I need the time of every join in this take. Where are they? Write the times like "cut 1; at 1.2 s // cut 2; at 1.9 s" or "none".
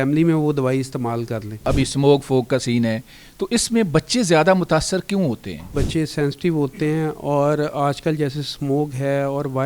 cut 1; at 1.7 s // cut 2; at 5.7 s